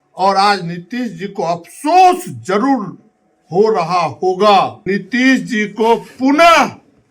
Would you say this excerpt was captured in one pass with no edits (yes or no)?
no